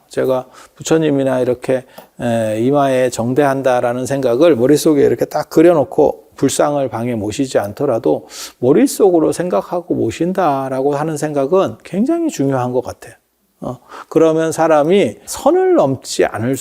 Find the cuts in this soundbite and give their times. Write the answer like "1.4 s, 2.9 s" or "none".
6.3 s, 15.3 s